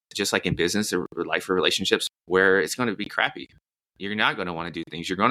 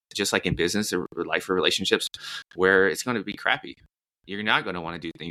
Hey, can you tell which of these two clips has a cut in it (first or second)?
first